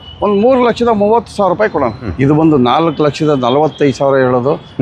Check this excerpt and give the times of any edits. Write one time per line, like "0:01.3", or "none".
0:02.1